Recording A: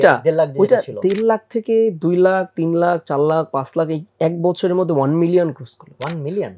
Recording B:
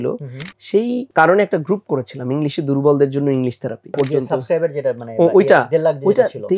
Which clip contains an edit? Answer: B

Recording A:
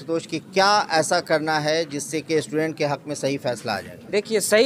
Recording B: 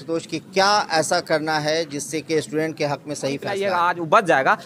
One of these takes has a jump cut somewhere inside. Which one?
B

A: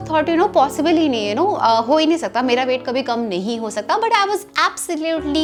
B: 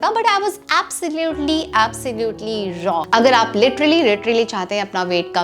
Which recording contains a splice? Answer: B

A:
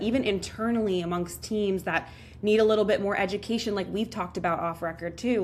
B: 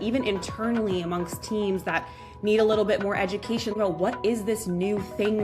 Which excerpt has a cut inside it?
B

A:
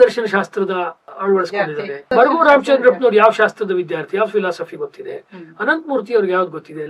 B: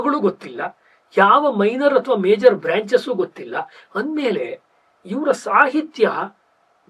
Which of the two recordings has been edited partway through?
A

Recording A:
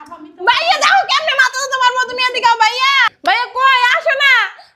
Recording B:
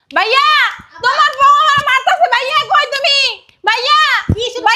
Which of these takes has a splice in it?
A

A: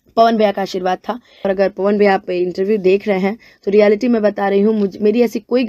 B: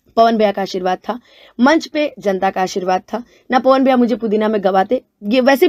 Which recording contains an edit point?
A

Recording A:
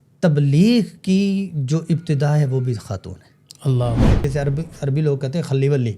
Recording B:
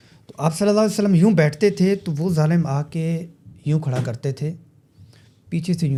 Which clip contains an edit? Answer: A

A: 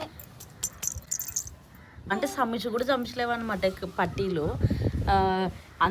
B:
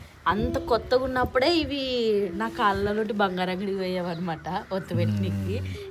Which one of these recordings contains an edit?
A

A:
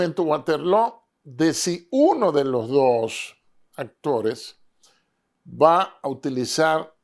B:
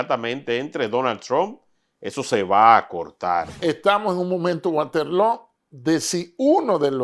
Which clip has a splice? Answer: B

